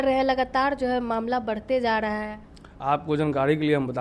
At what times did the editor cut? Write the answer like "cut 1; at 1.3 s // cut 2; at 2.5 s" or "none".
none